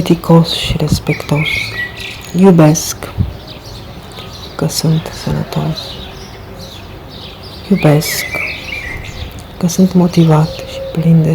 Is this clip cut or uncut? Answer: cut